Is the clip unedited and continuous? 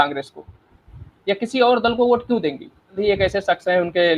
no; 1 cut; at 3.0 s

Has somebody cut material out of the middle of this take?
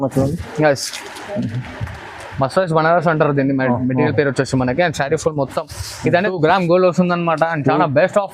yes; 1 cut; at 6.3 s

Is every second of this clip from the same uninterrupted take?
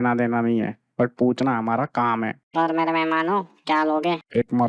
yes; 0 cuts

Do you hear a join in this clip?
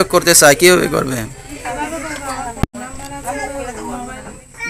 no; 0 cuts

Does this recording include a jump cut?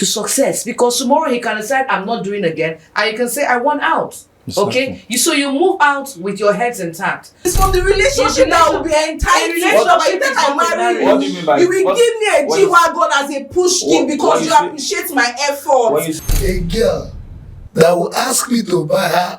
yes; 2 cuts; at 7.5 s, 16.1 s

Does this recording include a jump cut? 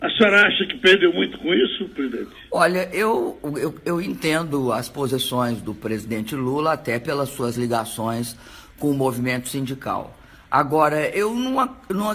yes; 1 cut; at 2.9 s

